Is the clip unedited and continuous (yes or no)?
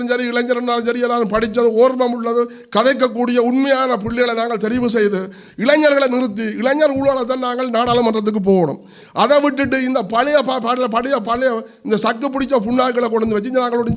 yes